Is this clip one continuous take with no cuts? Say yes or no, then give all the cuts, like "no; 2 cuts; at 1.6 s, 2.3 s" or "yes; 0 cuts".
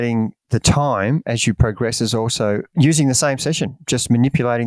yes; 0 cuts